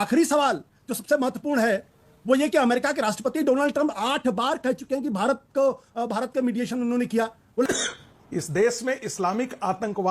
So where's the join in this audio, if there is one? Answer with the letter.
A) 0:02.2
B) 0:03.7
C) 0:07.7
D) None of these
C